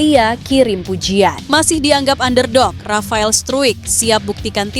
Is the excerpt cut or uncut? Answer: cut